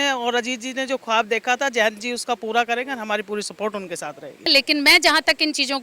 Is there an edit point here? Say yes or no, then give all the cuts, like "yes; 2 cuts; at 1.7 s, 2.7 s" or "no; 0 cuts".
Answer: yes; 1 cut; at 4.5 s